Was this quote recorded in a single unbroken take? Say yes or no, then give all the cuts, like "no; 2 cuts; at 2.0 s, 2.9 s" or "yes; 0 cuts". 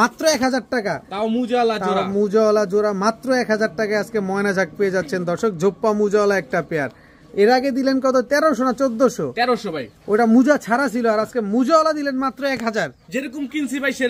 yes; 0 cuts